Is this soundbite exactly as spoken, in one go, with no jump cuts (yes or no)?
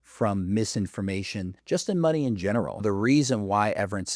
no